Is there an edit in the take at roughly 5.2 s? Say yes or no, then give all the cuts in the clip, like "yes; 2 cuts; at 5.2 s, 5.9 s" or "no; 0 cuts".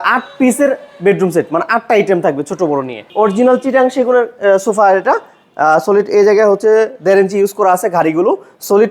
no; 1 cut; at 3.0 s